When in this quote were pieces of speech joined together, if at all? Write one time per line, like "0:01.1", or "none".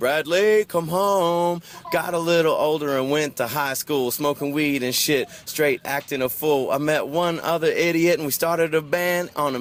none

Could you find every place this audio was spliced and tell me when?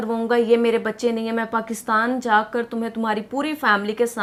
none

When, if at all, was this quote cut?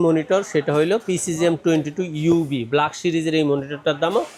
none

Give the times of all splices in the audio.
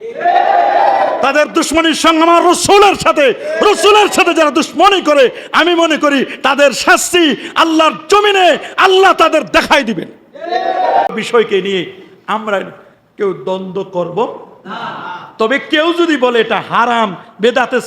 0:11.1

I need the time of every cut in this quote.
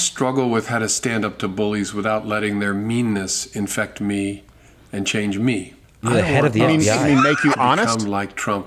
none

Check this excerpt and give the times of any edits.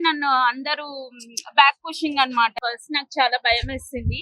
0:02.5

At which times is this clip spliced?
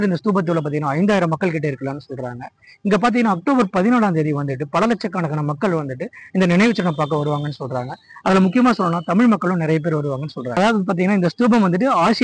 none

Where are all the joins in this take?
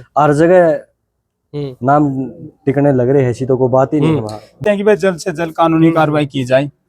0:04.6

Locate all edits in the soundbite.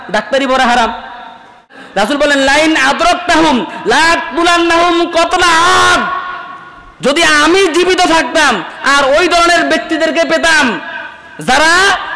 0:01.7

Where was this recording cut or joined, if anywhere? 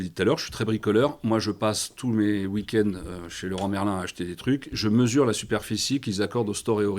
none

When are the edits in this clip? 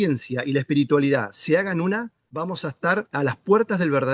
0:02.2
0:03.1

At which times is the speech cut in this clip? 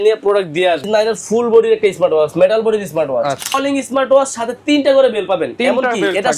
0:00.9
0:03.5

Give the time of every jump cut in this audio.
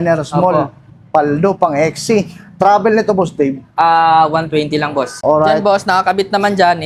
0:05.1

